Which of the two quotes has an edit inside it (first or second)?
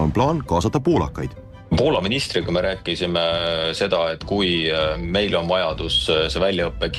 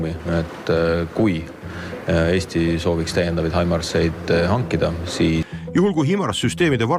second